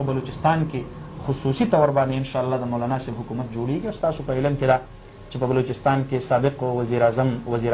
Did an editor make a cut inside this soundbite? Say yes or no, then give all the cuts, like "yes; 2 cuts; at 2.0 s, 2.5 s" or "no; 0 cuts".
no; 0 cuts